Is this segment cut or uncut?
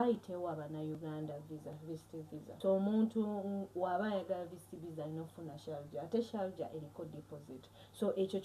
cut